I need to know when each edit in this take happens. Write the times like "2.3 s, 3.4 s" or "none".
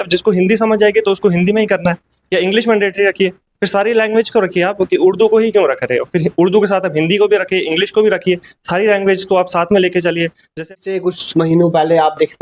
10.7 s